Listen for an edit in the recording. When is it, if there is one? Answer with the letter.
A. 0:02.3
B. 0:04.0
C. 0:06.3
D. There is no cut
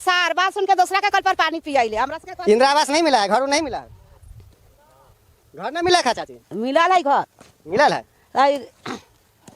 D